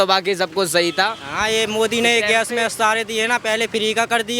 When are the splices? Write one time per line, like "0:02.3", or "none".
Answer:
0:01.2